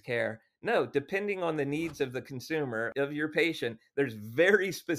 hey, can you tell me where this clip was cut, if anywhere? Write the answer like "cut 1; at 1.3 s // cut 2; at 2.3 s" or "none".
cut 1; at 2.9 s

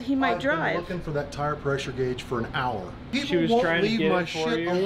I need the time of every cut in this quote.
cut 1; at 3.0 s

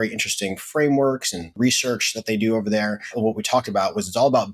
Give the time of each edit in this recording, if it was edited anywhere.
cut 1; at 1.5 s // cut 2; at 3.1 s

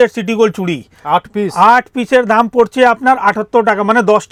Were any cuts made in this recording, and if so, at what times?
none

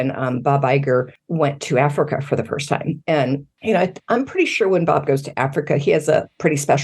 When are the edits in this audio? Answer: cut 1; at 1.2 s // cut 2; at 3.5 s

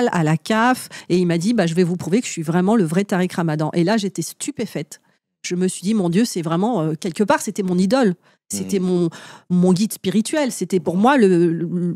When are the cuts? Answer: cut 1; at 0.9 s

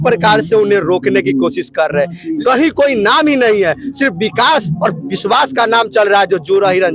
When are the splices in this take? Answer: cut 1; at 2.3 s

